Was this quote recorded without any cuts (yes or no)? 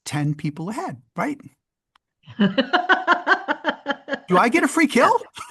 yes